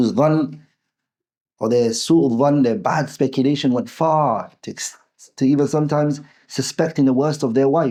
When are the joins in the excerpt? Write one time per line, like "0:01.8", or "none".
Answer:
none